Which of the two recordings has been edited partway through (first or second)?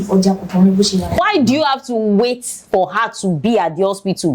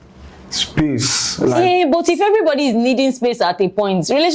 first